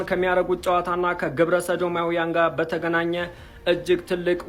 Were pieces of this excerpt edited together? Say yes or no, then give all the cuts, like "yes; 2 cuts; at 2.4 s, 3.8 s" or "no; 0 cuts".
no; 0 cuts